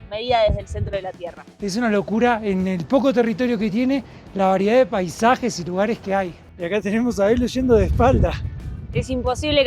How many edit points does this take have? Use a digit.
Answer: 2